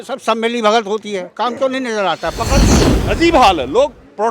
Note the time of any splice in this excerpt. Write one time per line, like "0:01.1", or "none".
0:02.7